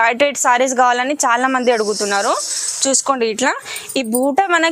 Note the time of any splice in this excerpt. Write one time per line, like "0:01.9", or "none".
none

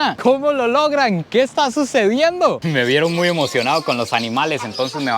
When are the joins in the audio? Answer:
0:02.6

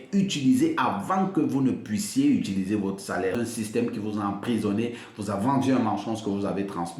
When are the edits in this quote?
0:03.4

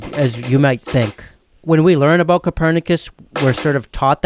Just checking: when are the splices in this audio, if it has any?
0:01.4

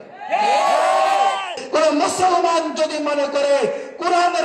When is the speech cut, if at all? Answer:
0:01.6

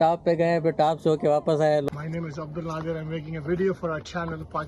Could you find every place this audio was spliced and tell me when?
0:01.9

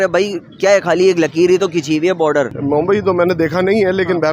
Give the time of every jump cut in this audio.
0:02.5

